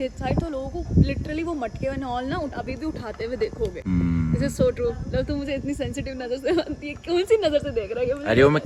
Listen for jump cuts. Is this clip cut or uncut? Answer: uncut